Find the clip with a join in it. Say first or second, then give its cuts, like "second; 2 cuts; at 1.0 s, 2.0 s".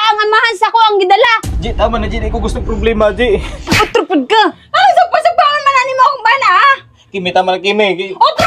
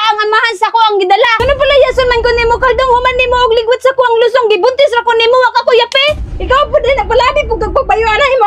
second; 1 cut; at 1.4 s